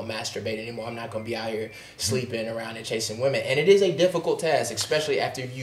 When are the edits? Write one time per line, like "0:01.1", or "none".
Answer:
none

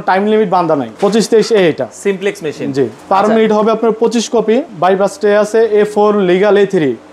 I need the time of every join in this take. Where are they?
0:00.9
0:04.7

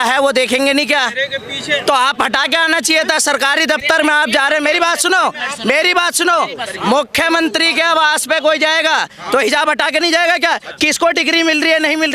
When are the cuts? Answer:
none

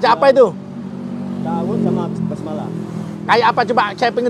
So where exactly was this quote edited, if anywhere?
none

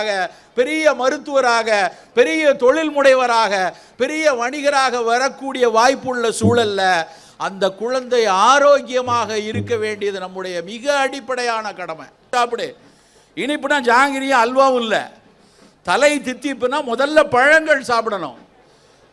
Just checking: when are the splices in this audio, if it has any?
0:12.3

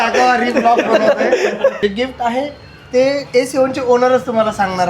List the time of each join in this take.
0:01.8

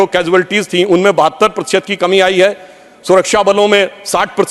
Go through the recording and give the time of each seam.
none

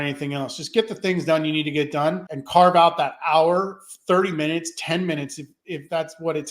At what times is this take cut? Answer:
0:02.3

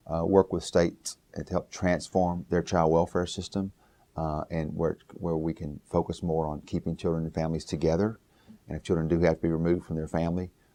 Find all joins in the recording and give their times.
none

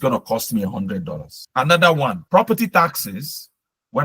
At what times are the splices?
0:01.4
0:02.2

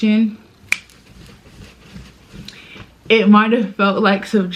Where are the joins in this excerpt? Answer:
none

